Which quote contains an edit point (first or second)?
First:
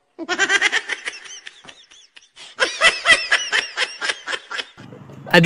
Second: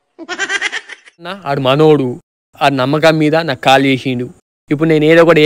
second